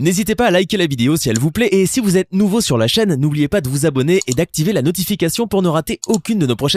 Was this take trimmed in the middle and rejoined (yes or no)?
no